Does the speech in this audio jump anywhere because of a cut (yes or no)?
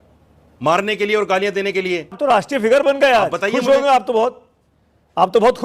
yes